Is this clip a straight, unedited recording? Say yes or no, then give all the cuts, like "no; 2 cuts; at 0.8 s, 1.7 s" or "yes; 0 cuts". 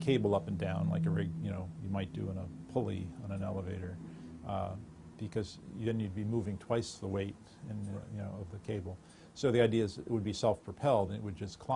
no; 1 cut; at 8.0 s